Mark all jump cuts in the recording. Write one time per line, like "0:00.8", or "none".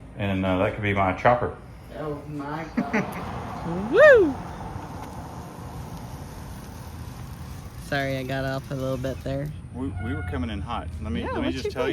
0:03.1